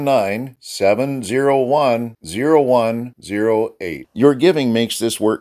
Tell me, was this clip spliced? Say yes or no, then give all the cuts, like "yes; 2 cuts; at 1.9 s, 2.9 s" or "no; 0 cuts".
no; 0 cuts